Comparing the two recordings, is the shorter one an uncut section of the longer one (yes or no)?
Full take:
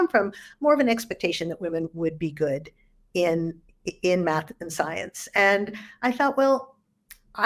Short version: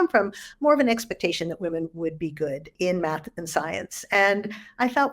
no